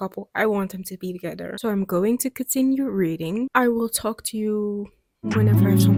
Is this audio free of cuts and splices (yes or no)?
yes